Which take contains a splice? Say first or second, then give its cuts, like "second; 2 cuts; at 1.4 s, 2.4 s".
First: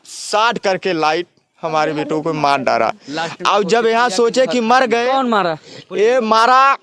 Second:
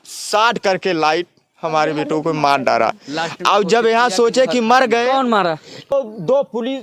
second; 1 cut; at 5.9 s